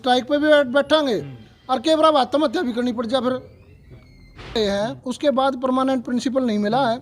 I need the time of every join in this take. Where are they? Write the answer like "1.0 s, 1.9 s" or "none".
4.6 s